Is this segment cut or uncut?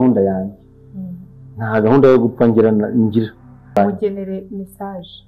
cut